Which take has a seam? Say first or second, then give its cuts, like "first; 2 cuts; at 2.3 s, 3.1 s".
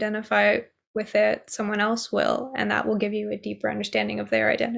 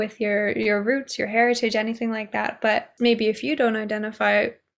second; 1 cut; at 2.9 s